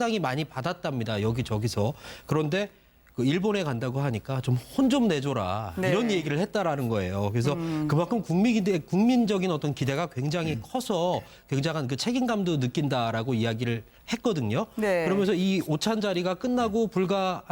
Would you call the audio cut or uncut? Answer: uncut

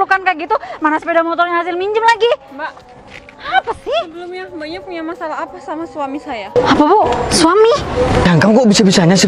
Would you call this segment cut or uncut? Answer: cut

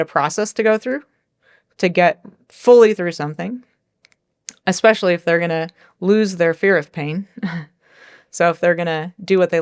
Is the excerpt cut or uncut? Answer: uncut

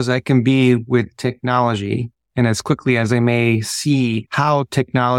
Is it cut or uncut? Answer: cut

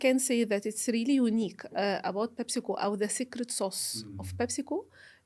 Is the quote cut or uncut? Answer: uncut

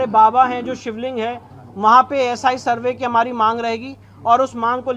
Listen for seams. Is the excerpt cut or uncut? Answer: uncut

